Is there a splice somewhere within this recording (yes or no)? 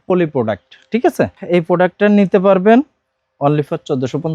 yes